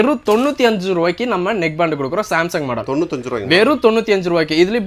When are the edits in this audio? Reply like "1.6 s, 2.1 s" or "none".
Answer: none

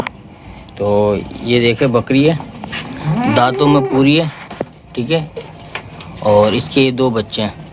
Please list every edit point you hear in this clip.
none

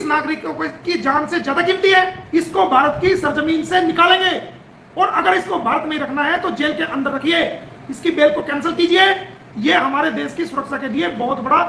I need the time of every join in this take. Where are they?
2.2 s

